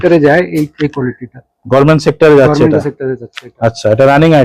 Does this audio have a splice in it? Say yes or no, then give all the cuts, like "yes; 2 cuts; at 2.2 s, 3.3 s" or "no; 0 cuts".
no; 0 cuts